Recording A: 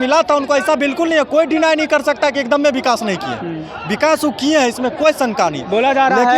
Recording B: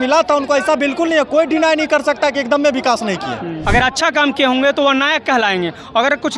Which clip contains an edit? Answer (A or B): B